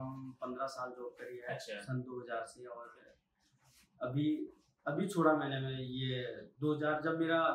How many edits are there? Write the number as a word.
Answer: zero